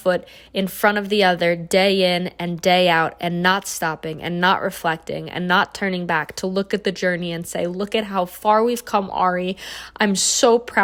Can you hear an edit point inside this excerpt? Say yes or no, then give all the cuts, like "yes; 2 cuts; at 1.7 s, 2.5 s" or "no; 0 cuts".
no; 0 cuts